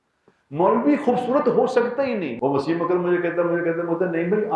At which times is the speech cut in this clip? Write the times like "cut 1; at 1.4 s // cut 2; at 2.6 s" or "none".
cut 1; at 2.3 s